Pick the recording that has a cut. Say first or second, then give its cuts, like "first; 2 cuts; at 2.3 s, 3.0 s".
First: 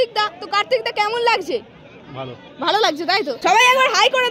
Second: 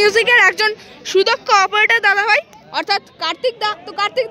first; 1 cut; at 3.3 s